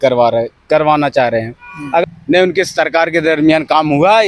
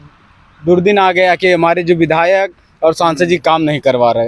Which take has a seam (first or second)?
first